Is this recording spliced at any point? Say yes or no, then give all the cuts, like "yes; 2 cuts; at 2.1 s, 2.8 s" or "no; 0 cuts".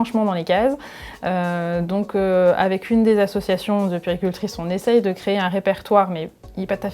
no; 0 cuts